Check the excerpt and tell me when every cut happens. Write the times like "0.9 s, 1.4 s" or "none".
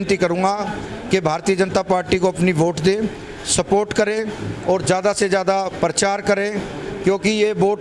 none